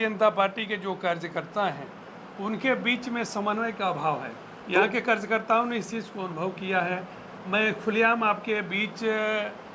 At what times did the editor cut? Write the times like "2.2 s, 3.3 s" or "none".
none